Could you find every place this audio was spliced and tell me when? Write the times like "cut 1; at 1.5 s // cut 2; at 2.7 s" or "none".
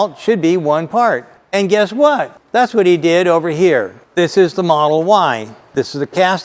none

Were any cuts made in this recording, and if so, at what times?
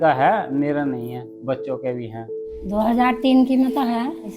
cut 1; at 2.1 s

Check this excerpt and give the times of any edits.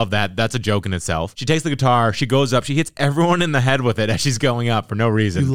none

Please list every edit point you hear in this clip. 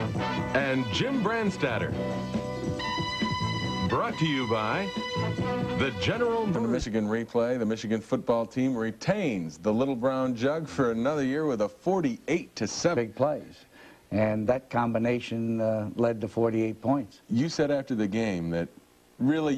none

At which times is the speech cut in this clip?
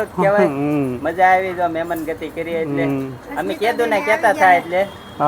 none

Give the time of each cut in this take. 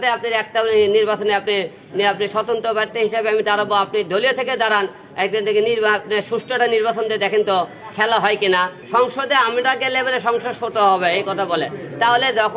cut 1; at 8.8 s

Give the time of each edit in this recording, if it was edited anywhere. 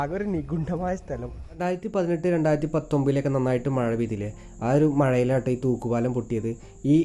cut 1; at 1.4 s

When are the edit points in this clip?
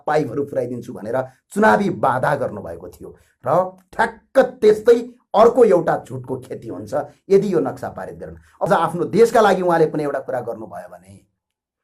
cut 1; at 8.7 s

